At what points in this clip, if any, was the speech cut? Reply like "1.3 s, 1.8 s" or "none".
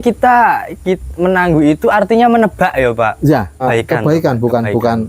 3.6 s